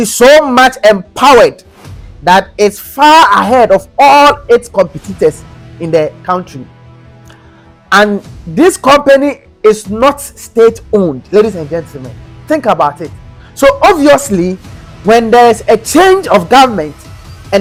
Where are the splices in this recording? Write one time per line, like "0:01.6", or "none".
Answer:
none